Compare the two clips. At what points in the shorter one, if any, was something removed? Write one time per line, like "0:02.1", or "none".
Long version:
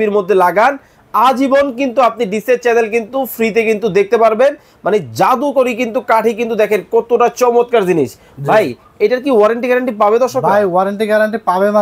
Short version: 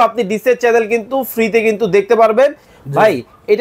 0:02.7